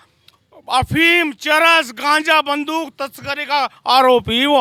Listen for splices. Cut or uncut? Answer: uncut